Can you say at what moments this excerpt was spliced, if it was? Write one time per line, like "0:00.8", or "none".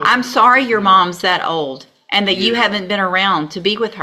none